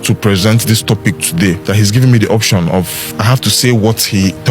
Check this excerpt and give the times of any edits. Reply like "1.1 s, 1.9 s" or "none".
1.6 s, 3.0 s